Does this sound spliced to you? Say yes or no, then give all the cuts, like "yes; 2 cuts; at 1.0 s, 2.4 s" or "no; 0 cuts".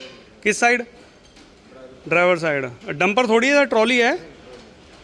no; 0 cuts